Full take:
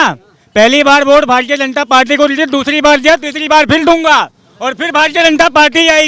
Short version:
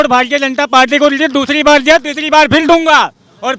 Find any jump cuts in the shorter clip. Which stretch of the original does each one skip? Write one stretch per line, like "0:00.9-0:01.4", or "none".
none